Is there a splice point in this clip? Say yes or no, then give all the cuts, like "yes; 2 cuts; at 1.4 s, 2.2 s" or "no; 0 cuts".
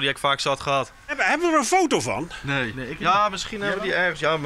yes; 1 cut; at 1.1 s